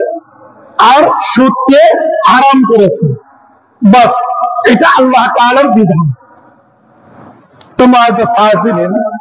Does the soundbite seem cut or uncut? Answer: uncut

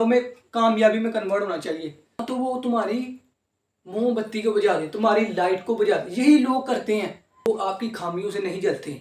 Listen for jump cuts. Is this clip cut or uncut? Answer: cut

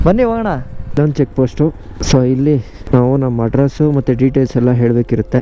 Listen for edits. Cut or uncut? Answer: cut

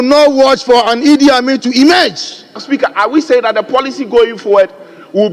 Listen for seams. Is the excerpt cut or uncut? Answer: cut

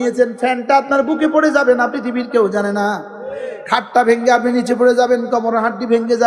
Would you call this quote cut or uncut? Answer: uncut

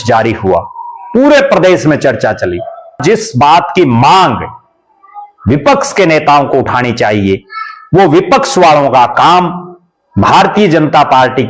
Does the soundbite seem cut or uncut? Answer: cut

